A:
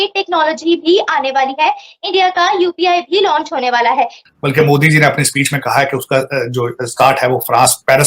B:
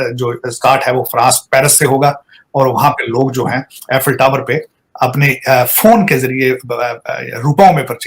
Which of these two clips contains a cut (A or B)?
A